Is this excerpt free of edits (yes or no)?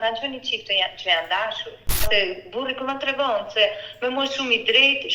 no